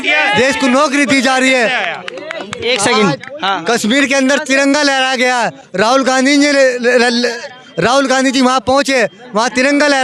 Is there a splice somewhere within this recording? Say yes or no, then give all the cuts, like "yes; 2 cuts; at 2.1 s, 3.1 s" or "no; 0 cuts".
no; 0 cuts